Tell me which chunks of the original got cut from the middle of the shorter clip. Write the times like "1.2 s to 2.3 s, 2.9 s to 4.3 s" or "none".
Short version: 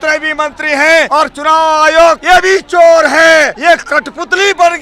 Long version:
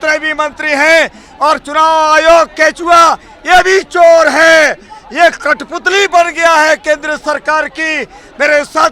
1.1 s to 1.4 s, 2.5 s to 3.4 s, 4.8 s to 5.1 s